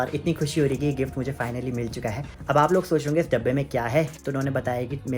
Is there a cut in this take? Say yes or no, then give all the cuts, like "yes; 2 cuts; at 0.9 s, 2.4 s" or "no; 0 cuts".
yes; 2 cuts; at 2.3 s, 4.2 s